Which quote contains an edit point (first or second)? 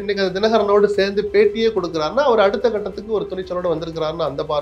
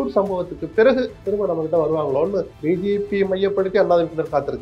second